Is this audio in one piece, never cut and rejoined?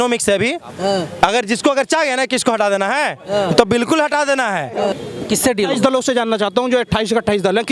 no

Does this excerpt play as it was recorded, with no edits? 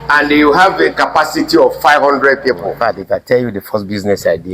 no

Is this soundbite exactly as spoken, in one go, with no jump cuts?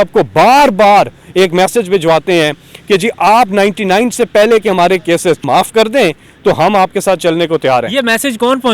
no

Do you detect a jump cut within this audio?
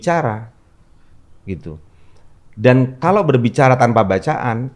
no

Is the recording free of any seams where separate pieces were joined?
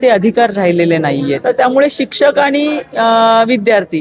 no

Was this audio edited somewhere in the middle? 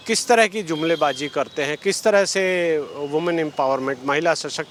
no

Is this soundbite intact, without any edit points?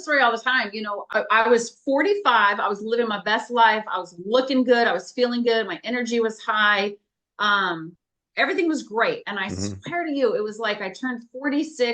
no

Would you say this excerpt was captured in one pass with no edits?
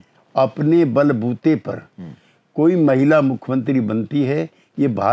yes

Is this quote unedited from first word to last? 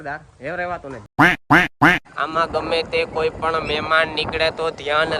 no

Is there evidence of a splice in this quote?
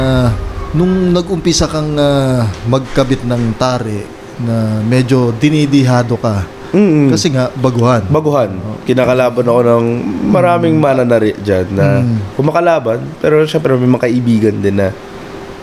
no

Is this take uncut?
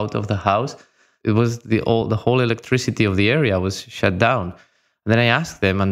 no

